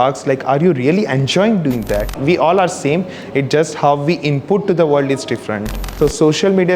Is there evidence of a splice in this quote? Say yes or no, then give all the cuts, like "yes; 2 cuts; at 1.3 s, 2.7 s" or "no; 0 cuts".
yes; 2 cuts; at 2.2 s, 5.9 s